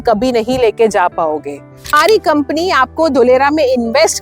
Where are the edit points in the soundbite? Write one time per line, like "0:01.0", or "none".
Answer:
0:02.0